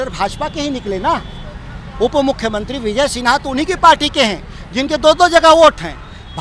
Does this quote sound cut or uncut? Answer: uncut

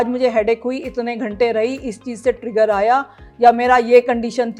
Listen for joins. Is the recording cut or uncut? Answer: uncut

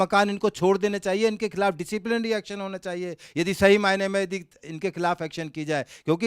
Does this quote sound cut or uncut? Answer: uncut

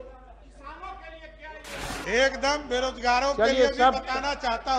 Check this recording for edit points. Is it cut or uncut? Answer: uncut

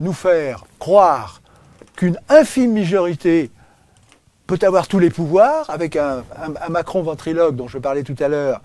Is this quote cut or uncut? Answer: uncut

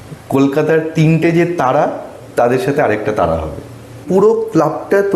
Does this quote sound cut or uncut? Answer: cut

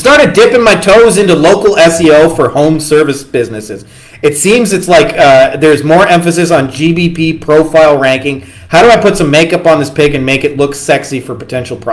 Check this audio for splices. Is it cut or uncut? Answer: uncut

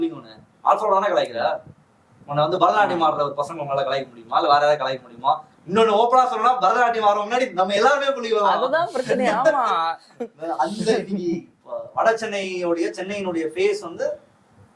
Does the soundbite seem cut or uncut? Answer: uncut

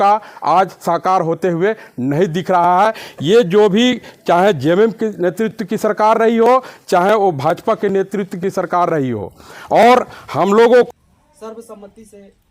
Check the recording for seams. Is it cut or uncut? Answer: cut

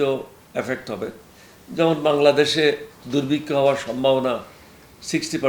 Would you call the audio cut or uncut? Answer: uncut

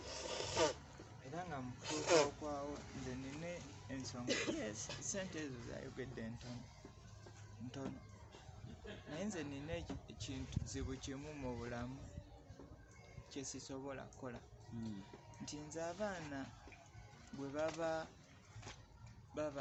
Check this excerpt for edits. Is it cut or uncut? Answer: uncut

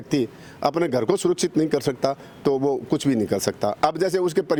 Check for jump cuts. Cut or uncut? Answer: uncut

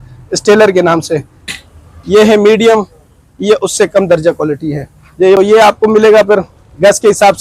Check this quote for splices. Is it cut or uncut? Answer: cut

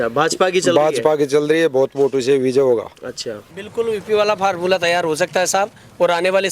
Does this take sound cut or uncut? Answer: cut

